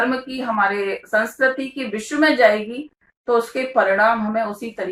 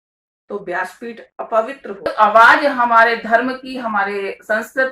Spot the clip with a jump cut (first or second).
second